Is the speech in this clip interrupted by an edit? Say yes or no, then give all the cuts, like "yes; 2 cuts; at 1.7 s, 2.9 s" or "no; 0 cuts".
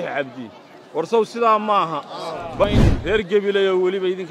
yes; 1 cut; at 2.6 s